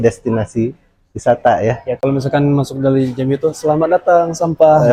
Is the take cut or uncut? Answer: uncut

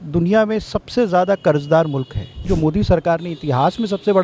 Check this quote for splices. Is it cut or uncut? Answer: cut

